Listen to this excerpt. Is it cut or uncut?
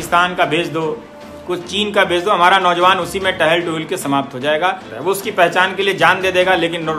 cut